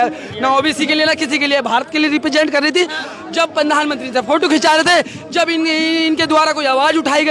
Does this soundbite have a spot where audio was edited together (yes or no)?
no